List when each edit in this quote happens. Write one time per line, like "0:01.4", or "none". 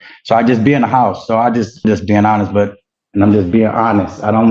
0:01.9
0:02.9